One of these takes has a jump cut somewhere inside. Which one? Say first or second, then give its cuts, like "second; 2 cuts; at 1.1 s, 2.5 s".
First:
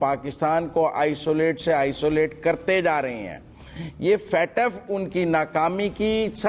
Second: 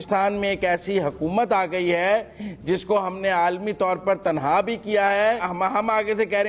second; 1 cut; at 5.5 s